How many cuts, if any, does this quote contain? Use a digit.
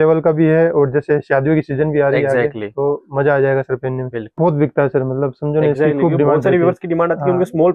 1